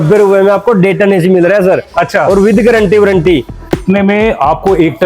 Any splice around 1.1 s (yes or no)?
no